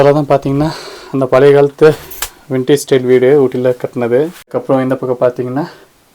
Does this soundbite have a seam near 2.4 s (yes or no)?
no